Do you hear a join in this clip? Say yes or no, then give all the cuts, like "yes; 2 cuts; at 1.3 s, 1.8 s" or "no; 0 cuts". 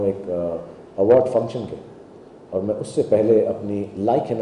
no; 0 cuts